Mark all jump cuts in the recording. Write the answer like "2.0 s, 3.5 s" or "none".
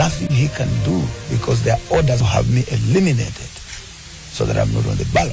2.2 s